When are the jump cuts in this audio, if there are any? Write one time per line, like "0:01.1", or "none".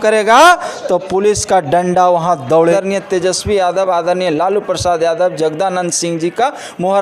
0:02.7